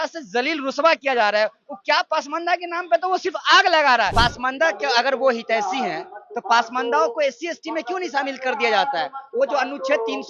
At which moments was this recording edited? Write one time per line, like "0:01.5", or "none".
0:04.1